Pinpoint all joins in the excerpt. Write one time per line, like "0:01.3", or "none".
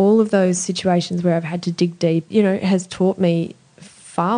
0:02.3

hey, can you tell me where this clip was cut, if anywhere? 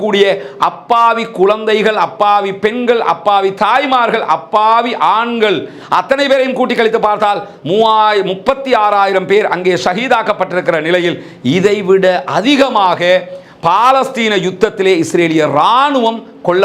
none

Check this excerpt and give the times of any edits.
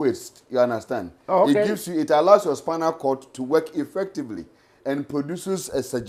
none

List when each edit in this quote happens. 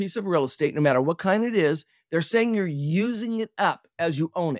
none

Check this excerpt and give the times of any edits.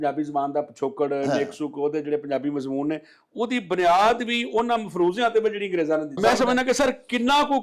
0:06.2

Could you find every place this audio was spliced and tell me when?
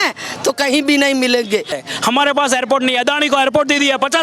0:01.8

